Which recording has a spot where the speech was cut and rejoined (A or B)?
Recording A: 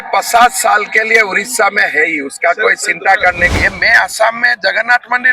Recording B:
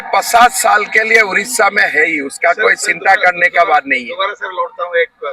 A